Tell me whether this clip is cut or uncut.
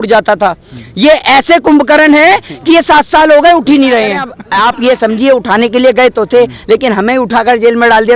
cut